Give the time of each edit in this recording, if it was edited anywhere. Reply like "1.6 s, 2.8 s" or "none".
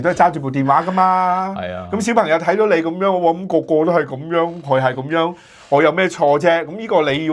none